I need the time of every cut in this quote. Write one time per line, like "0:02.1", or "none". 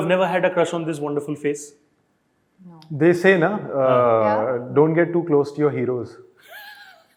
none